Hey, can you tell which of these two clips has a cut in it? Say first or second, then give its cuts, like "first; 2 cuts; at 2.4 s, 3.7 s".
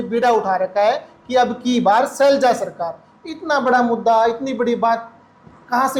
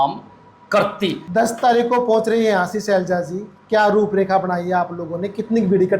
second; 1 cut; at 1.2 s